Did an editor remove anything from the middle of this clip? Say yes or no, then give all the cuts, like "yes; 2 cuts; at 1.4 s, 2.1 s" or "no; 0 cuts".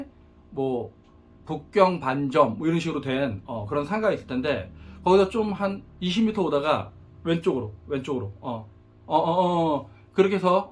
no; 0 cuts